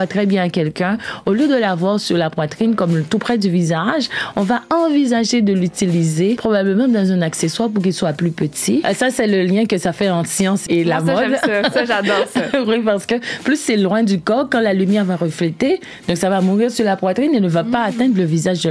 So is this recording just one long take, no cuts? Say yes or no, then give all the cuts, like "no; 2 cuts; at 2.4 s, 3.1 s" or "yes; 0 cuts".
no; 3 cuts; at 6.4 s, 8.8 s, 10.6 s